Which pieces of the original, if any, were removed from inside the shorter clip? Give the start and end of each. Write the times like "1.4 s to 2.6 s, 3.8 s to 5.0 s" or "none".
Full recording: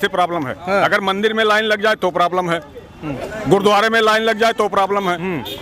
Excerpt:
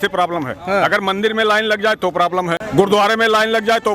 2.6 s to 3.4 s